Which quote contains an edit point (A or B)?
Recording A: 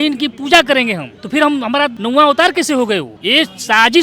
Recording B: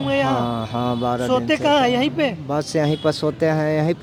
A